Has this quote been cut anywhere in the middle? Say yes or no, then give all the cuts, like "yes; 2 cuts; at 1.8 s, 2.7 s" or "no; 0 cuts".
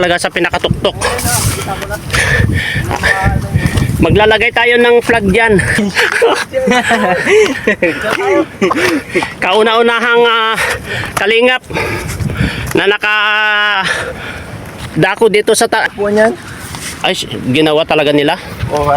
yes; 2 cuts; at 5.8 s, 15.9 s